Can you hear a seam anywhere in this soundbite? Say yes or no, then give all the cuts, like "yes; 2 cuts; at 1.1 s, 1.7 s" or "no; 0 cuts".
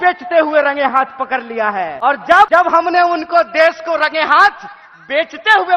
yes; 2 cuts; at 1.9 s, 2.5 s